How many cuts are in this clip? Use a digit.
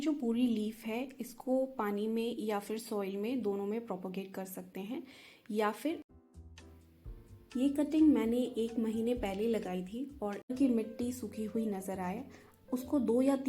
2